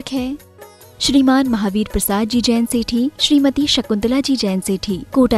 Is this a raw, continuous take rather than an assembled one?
yes; 0 cuts

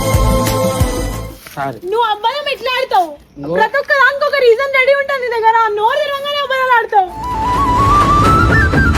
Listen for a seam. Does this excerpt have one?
no; 0 cuts

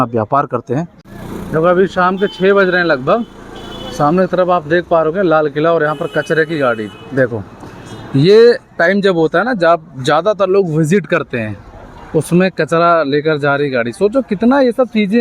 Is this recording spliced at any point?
yes; 1 cut; at 0.9 s

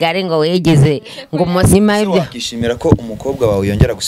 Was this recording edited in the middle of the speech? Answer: yes; 1 cut; at 1.7 s

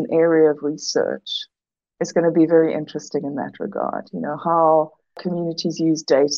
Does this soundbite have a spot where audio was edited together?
yes; 1 cut; at 5.2 s

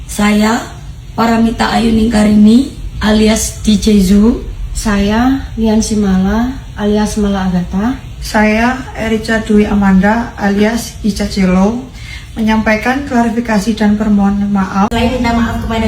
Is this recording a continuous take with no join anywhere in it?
no; 1 cut; at 14.9 s

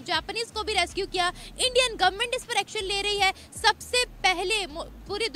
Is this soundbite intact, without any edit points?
yes; 0 cuts

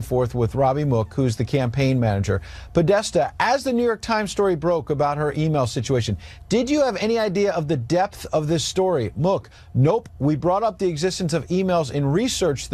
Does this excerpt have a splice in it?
yes; 1 cut; at 8.1 s

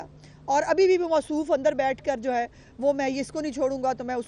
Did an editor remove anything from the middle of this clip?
no; 0 cuts

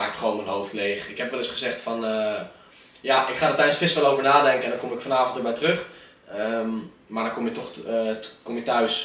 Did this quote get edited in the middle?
no; 0 cuts

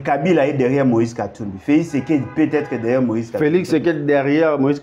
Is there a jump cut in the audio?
no; 0 cuts

